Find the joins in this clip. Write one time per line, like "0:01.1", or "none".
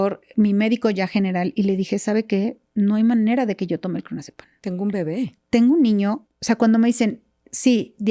0:06.2